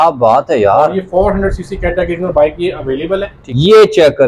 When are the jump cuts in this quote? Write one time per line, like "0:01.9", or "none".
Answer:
0:03.3